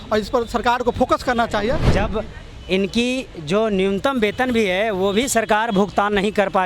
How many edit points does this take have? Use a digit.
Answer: 1